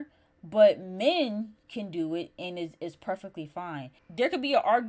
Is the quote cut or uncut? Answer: cut